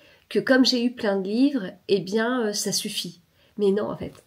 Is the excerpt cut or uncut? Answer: uncut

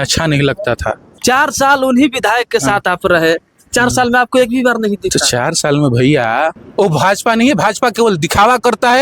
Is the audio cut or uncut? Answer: cut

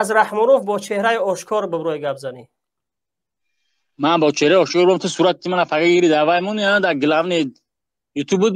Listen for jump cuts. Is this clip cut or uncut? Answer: uncut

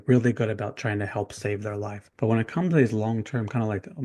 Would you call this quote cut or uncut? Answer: cut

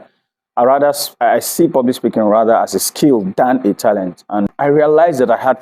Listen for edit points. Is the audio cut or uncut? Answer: cut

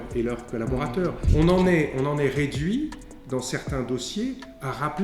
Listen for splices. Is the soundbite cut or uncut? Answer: cut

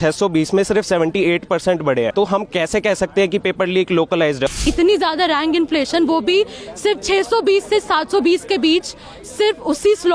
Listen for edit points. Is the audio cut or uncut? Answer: cut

